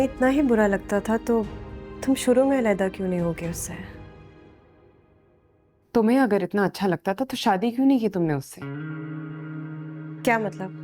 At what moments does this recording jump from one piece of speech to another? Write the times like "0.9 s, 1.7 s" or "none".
none